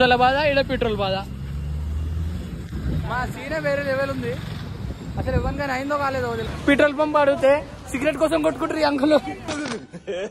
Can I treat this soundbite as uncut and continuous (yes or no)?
yes